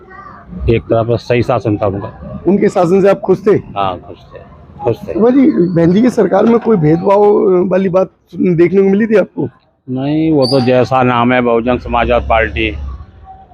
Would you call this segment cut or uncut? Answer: cut